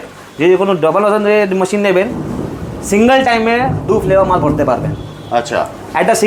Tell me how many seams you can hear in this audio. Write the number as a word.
zero